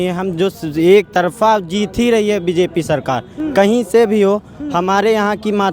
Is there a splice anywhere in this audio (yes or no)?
no